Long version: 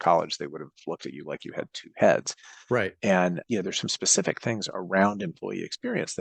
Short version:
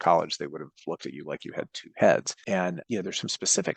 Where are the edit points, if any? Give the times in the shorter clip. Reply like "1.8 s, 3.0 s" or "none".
2.7 s